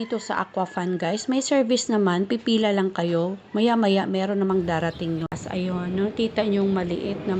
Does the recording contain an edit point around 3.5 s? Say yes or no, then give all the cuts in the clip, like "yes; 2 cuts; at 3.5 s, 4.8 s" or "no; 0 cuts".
no; 1 cut; at 5.4 s